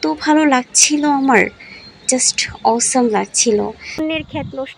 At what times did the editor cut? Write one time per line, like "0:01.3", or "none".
0:03.9

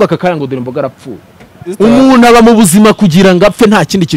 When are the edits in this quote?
0:01.7

